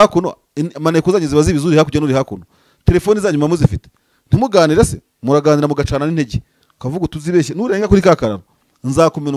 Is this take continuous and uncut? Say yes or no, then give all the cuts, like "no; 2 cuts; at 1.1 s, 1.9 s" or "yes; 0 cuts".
yes; 0 cuts